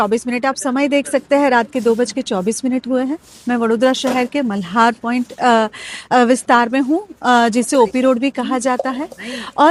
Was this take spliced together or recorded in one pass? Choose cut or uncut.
uncut